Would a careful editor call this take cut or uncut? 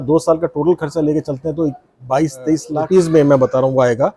uncut